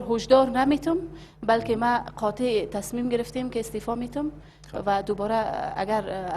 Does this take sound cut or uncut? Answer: cut